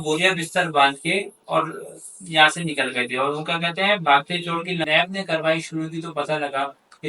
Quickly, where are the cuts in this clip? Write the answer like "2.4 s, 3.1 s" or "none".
4.9 s